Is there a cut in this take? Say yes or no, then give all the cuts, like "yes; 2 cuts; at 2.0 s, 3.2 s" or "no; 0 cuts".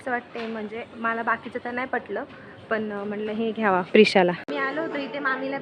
yes; 1 cut; at 4.4 s